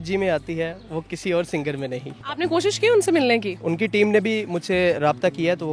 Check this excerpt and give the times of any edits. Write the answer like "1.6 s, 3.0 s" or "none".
2.2 s, 3.6 s